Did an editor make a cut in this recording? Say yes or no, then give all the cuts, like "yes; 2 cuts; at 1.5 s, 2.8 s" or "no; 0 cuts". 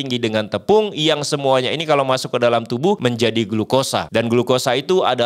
yes; 2 cuts; at 3.0 s, 4.1 s